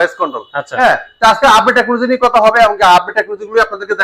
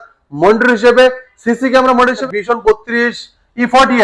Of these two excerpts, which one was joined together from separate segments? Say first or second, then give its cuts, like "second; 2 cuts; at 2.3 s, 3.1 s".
second; 1 cut; at 2.2 s